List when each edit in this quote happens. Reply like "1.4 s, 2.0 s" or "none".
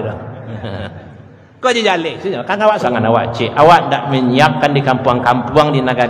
2.9 s